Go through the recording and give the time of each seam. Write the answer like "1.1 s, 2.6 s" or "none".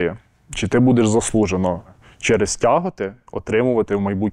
2.0 s